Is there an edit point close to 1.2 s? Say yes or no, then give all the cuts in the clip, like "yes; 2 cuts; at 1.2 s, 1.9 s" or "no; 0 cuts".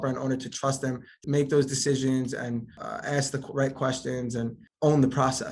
yes; 3 cuts; at 1.2 s, 2.8 s, 4.6 s